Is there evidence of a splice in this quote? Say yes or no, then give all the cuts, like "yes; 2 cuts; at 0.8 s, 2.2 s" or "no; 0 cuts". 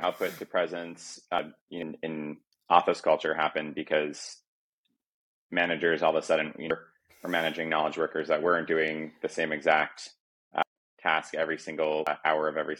yes; 4 cuts; at 1.4 s, 6.7 s, 10.6 s, 12.1 s